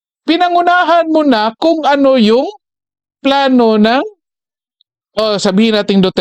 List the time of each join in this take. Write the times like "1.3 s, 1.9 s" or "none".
none